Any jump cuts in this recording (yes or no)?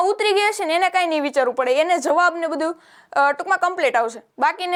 no